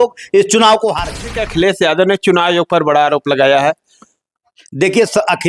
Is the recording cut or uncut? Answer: cut